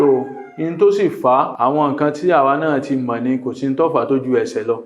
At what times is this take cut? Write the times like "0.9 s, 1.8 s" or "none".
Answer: 1.5 s